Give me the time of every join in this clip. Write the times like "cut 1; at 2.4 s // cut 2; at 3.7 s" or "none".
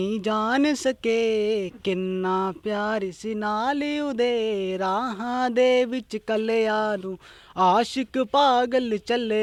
none

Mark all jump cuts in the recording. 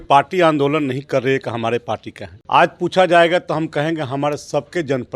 cut 1; at 2.3 s

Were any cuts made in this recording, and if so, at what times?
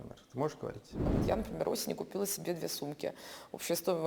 cut 1; at 1.1 s

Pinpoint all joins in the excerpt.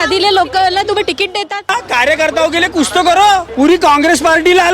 cut 1; at 1.7 s // cut 2; at 3.5 s

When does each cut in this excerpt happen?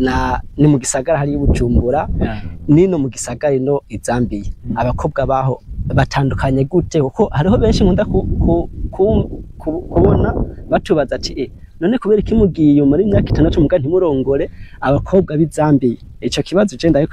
none

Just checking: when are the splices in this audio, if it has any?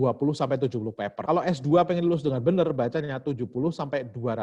cut 1; at 1.1 s

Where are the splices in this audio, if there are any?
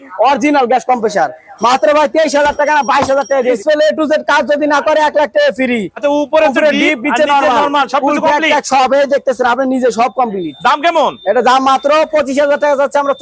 cut 1; at 3.6 s // cut 2; at 5.9 s

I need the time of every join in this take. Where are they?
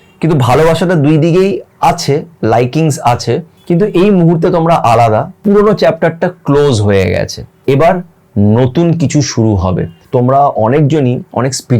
cut 1; at 3.5 s // cut 2; at 5.3 s // cut 3; at 7.4 s // cut 4; at 9.9 s

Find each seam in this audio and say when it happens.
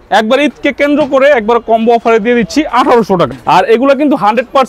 cut 1; at 3.3 s

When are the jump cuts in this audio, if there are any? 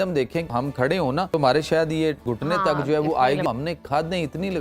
cut 1; at 0.9 s // cut 2; at 2.3 s // cut 3; at 3.4 s

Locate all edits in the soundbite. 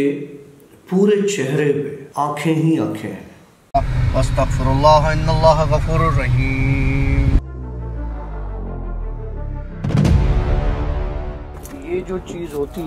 cut 1; at 2.0 s // cut 2; at 3.6 s

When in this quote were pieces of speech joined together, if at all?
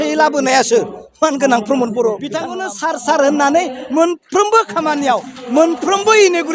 cut 1; at 2.5 s

